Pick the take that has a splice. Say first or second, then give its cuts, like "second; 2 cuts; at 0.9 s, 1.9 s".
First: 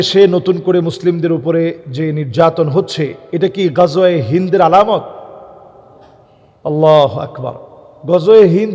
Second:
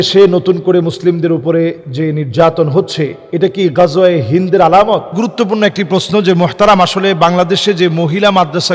second; 1 cut; at 5.1 s